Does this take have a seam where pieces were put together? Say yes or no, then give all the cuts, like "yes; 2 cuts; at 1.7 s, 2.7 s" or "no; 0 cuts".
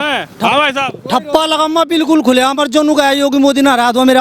no; 0 cuts